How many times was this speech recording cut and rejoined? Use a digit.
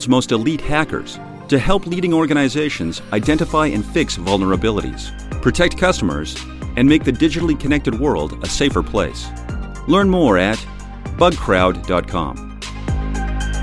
1